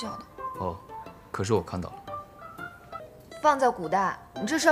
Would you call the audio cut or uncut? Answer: cut